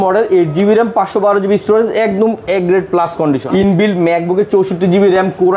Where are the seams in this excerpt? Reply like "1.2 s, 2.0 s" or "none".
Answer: 3.4 s